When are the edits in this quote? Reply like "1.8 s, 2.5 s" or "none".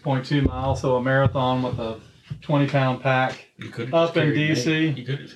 3.5 s